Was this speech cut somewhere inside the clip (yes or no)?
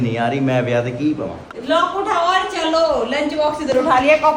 no